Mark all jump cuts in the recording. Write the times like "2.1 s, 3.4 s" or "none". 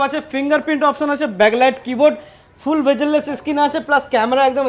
none